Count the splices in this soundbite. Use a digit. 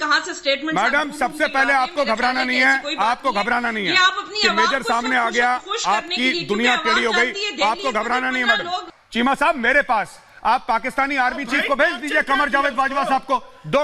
1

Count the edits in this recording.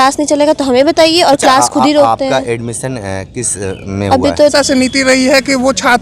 1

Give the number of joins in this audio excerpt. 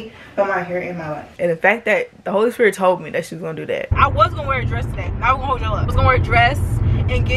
2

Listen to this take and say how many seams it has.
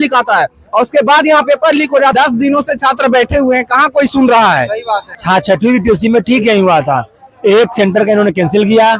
2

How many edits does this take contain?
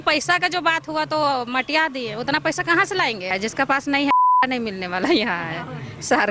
1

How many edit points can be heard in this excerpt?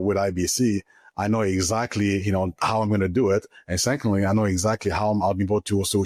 0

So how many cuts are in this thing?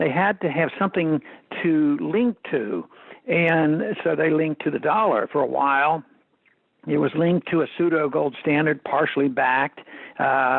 0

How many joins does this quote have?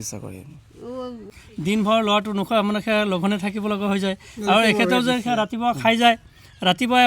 1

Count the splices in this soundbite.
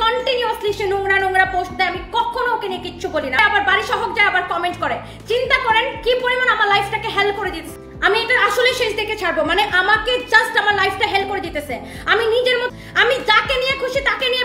3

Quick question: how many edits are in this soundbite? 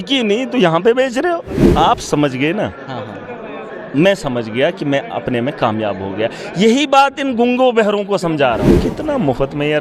2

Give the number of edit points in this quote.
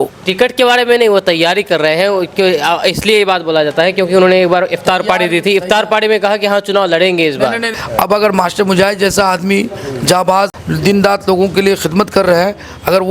2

